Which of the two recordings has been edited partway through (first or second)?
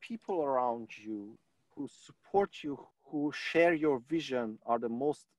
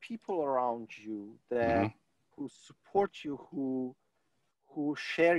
first